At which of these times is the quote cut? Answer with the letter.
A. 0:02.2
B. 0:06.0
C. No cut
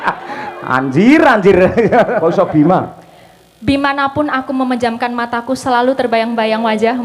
A